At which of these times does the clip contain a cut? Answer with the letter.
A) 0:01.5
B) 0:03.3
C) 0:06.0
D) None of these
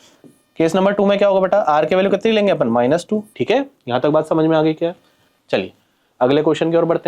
B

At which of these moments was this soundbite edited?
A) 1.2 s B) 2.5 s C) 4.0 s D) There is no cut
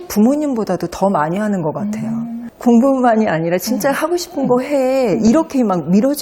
B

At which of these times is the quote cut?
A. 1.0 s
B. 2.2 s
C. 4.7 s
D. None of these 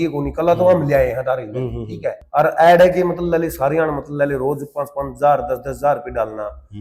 B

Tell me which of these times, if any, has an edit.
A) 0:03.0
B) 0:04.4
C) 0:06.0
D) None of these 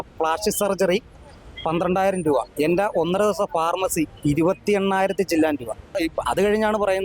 C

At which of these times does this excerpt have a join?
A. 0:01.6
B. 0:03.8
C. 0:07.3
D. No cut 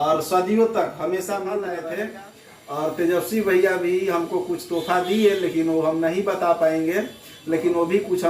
A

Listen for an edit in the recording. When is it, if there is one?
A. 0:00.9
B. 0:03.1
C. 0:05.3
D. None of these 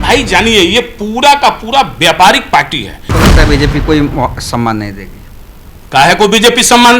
B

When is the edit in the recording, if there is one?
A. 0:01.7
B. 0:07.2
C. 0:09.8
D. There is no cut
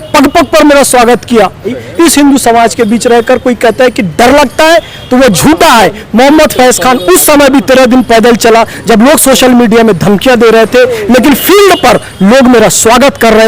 A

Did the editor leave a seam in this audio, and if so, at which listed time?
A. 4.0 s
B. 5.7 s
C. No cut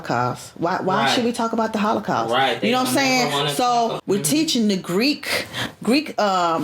A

